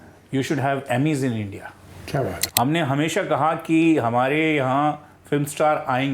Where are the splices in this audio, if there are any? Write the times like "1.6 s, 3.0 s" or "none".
2.4 s